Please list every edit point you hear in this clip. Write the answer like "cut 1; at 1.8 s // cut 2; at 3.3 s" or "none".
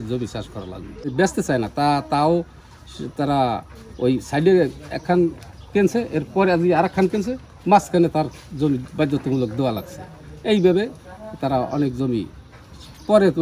cut 1; at 1.1 s